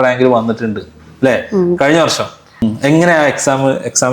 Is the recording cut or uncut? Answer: cut